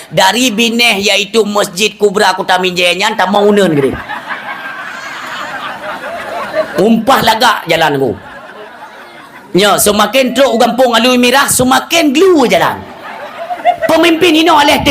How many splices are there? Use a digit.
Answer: 1